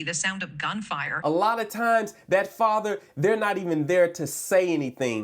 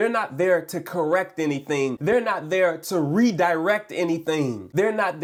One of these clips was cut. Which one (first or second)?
first